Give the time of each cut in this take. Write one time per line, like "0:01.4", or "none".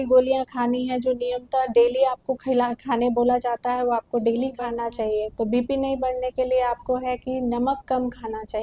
0:04.7

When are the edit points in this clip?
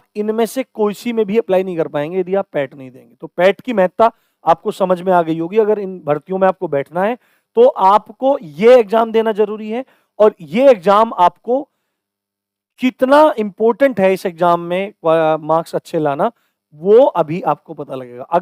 none

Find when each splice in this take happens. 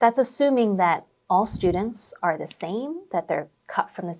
none

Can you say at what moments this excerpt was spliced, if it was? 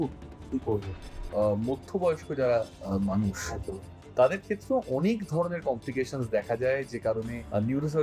0:01.2

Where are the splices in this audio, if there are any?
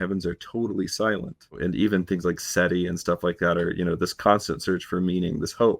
0:01.6

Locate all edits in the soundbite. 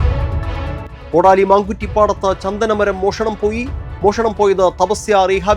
none

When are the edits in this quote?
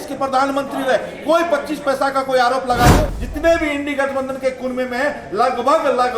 0:03.2

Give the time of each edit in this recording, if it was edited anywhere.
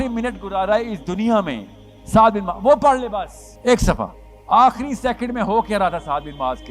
0:03.4
0:04.3

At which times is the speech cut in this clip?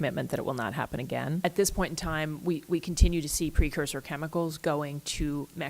0:01.4

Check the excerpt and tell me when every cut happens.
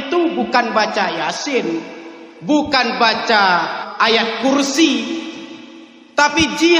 0:03.8

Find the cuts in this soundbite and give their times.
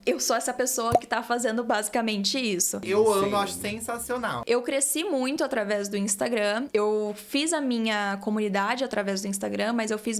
none

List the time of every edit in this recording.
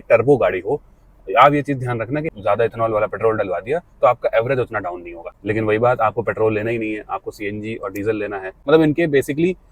0:02.3
0:05.4
0:08.5

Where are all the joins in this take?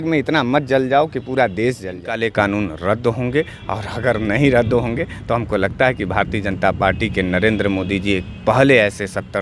0:02.2

